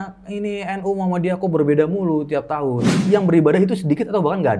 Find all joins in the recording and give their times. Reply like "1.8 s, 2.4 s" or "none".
2.9 s